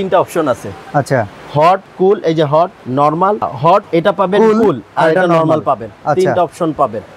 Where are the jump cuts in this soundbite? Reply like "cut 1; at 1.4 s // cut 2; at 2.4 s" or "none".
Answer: none